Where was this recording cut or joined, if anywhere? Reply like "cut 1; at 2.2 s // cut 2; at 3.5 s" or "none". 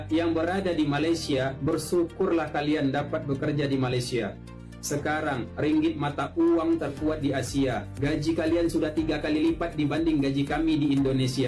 none